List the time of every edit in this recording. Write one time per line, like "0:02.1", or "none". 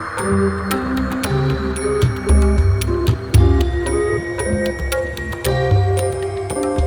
none